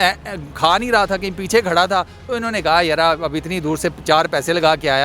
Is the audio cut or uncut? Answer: uncut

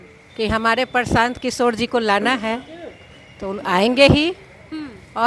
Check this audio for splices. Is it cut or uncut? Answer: uncut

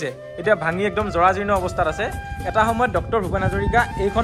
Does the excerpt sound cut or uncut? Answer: uncut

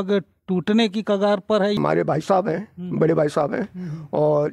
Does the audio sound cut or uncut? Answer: cut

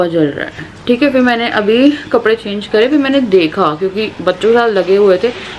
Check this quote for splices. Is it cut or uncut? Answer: uncut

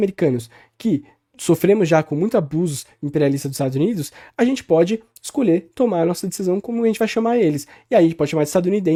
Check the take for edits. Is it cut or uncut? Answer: uncut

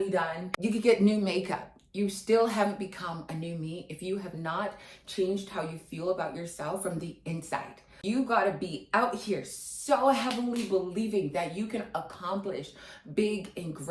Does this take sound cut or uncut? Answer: uncut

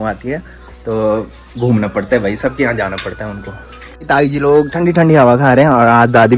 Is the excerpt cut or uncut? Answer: cut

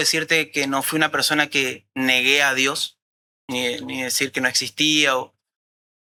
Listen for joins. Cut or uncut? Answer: uncut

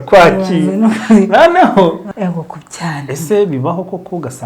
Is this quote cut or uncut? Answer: cut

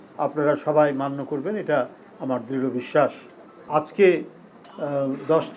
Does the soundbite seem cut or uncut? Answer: cut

